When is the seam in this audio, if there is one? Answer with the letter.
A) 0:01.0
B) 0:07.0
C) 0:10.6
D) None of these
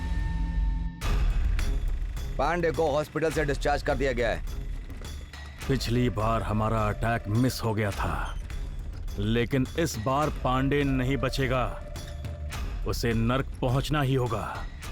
A